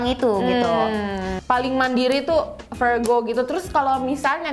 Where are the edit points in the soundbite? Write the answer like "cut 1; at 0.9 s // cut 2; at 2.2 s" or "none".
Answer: cut 1; at 1.3 s